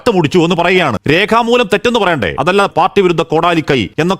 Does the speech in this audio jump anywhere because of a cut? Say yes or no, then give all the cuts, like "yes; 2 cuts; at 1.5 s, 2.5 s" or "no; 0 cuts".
yes; 2 cuts; at 1.0 s, 2.6 s